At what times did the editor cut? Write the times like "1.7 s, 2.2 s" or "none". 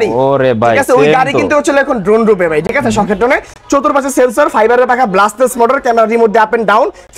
none